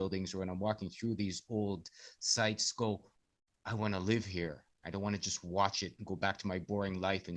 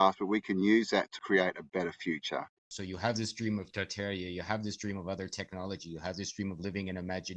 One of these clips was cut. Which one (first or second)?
second